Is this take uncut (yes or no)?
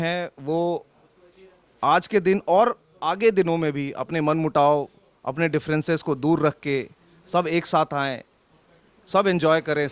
yes